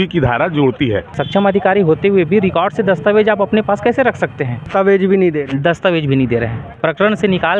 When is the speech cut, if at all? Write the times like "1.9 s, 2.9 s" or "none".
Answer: 1.1 s, 4.7 s, 6.7 s